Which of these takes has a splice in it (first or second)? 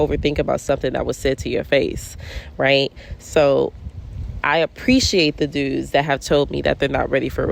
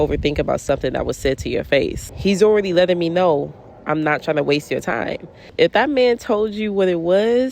second